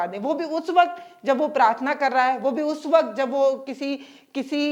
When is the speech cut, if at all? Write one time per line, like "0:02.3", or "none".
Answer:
none